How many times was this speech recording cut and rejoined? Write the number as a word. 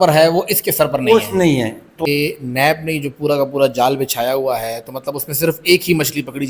one